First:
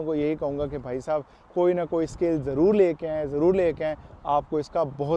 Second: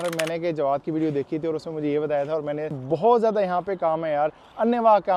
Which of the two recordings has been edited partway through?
second; 1 cut; at 2.8 s

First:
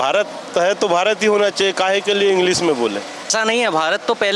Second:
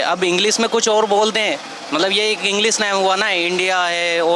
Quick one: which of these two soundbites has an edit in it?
first; 1 cut; at 3.3 s

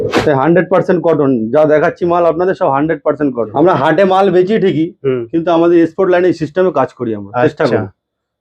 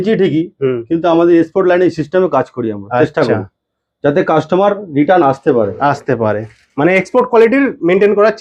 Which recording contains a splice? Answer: first; 1 cut; at 3.5 s

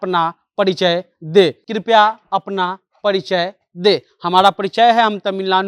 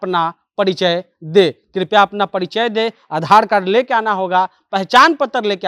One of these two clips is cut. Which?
first; 1 cut; at 1.6 s

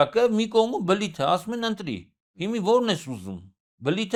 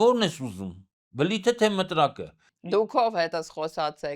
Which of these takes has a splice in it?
second; 1 cut; at 2.7 s

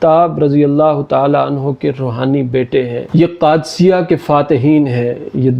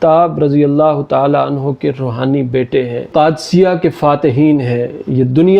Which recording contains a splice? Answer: second; 1 cut; at 3.1 s

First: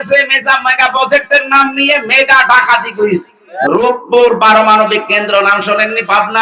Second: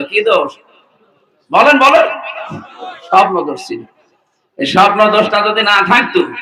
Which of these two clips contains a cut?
first; 1 cut; at 3.4 s

